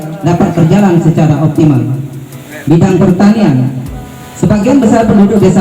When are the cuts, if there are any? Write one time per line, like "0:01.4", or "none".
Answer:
none